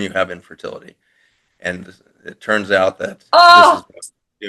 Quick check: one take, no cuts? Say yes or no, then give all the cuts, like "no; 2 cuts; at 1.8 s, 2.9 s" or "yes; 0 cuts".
yes; 0 cuts